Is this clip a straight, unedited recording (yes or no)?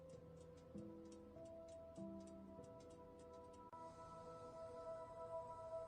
yes